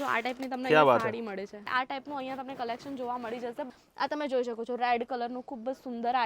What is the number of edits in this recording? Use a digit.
2